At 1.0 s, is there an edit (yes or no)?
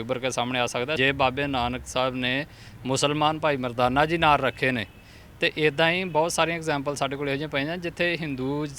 yes